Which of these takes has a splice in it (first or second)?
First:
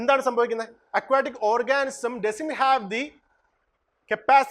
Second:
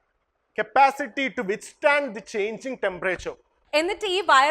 second